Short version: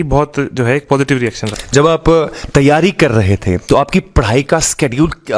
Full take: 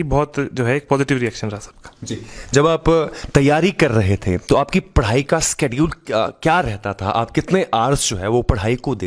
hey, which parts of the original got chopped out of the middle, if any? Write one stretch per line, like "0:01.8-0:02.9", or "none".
0:01.5-0:02.3

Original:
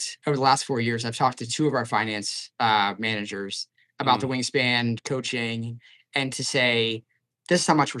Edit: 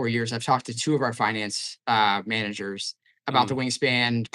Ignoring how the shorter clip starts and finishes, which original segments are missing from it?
none

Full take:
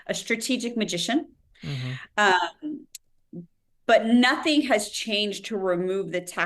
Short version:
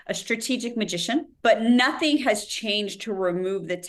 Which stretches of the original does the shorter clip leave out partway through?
0:01.3-0:03.8

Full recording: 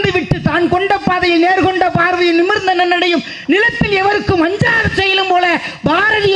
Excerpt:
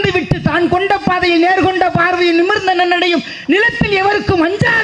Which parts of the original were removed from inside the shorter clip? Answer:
none

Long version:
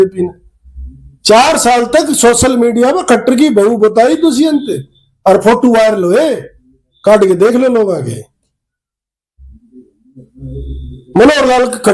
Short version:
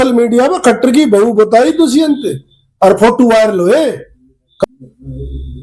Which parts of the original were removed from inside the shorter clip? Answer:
0:07.1-0:10.0

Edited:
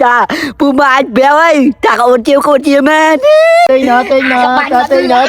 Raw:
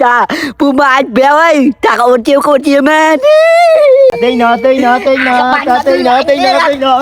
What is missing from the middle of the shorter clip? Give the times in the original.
0:03.7-0:04.6

